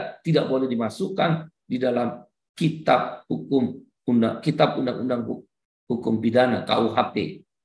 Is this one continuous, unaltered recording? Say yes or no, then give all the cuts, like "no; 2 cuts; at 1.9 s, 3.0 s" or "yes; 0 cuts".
yes; 0 cuts